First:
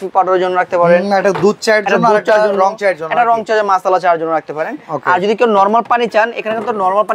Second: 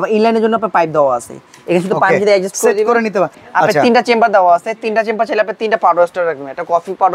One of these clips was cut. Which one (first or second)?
second